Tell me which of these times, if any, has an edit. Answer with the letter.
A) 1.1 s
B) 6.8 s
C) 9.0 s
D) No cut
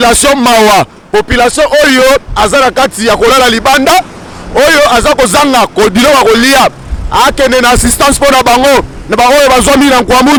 D